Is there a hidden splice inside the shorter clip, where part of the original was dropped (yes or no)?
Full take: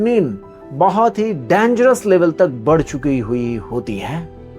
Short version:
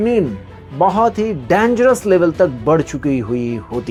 no